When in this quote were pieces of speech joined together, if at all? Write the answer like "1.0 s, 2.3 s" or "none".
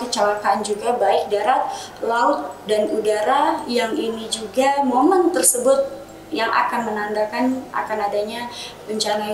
none